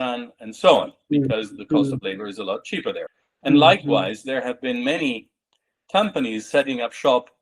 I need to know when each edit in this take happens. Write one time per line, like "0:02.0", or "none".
0:03.2